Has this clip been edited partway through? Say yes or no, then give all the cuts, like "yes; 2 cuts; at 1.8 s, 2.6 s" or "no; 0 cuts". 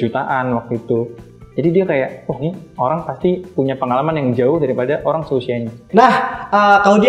no; 0 cuts